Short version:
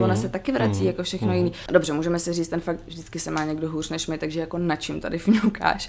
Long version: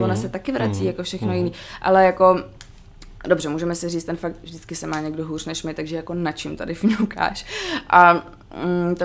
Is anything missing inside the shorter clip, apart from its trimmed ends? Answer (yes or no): yes